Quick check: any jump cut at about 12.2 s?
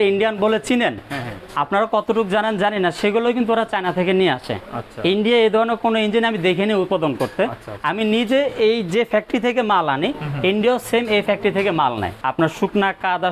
yes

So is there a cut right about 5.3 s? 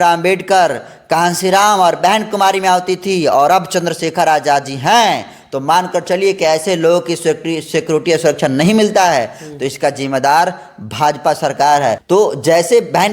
no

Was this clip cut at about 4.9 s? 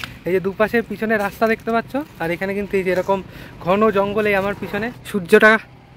yes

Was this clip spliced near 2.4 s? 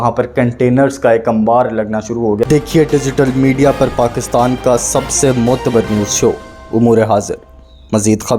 yes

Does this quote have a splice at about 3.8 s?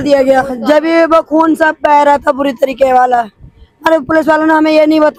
no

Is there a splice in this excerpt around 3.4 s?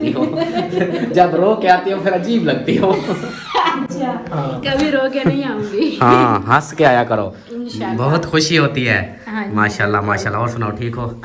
no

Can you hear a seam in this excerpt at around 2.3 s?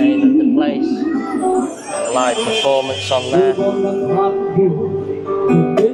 no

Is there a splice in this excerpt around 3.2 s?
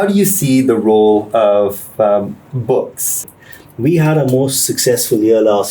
yes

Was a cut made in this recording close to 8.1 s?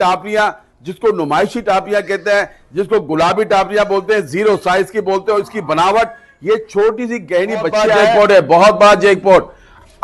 yes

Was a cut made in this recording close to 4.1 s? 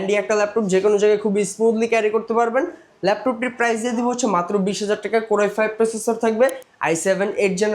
no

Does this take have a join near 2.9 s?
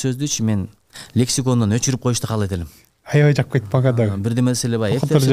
no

